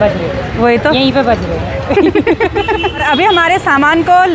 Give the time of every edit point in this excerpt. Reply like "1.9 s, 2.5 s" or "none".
3.0 s